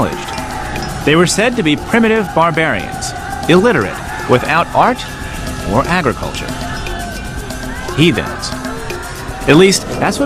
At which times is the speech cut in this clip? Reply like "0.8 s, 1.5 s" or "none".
7.8 s